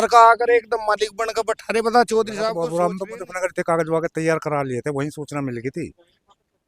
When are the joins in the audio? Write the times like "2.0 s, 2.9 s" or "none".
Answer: 2.6 s